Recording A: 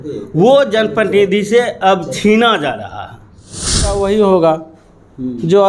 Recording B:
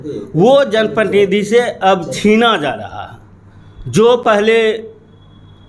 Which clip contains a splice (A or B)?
A